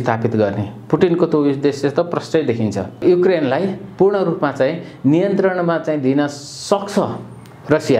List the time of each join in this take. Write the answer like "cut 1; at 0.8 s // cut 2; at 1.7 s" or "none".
cut 1; at 2.9 s